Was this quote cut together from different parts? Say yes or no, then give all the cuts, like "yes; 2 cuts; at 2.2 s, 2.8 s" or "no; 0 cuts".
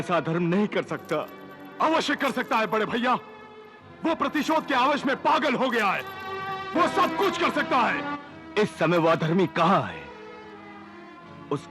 no; 0 cuts